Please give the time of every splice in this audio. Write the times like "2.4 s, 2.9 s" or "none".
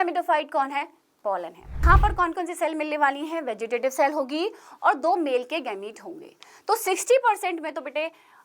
1.8 s